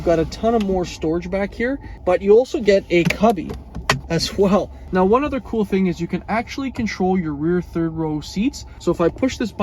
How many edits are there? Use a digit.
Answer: 3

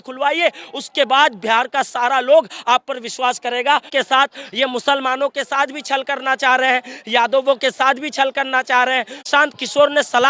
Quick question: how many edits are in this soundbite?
2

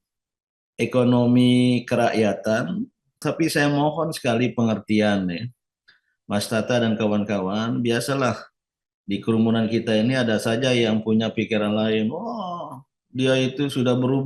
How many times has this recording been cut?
1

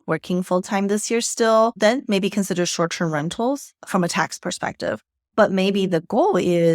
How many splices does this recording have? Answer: 1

